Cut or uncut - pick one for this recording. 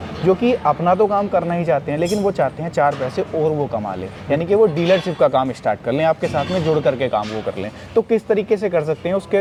uncut